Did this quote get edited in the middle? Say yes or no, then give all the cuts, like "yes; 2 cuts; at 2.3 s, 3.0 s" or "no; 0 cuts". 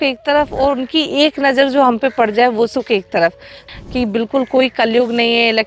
yes; 1 cut; at 3.6 s